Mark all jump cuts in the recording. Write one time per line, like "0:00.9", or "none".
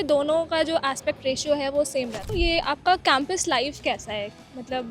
0:02.3